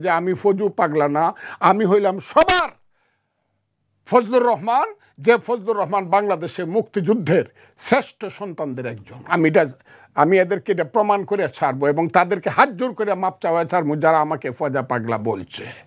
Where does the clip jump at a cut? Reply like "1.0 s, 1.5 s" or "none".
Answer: none